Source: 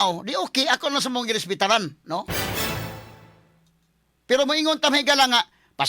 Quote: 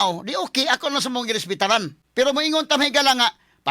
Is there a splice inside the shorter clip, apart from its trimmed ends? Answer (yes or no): yes